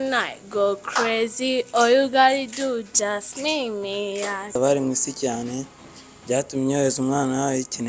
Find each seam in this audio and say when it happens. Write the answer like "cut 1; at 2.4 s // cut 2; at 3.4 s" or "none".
cut 1; at 4.6 s